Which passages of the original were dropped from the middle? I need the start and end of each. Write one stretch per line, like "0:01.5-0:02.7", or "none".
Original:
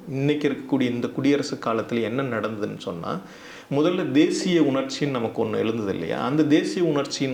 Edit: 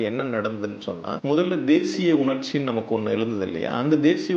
0:03.1-0:03.6